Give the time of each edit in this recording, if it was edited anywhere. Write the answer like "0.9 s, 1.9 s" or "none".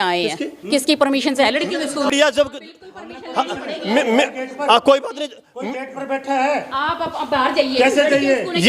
2.1 s